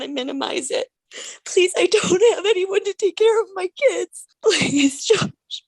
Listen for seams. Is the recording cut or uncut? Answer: cut